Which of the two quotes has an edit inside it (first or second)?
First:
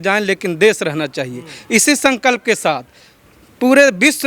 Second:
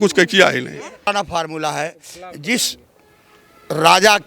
second